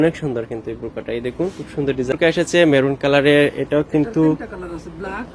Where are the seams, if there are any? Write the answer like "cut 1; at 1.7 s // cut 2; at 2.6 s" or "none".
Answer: cut 1; at 2.1 s